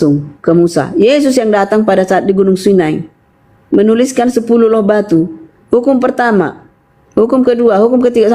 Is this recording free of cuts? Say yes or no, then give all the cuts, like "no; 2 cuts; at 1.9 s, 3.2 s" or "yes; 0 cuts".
yes; 0 cuts